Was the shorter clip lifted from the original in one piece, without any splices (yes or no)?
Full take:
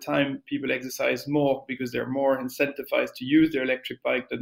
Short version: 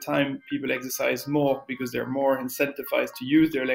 yes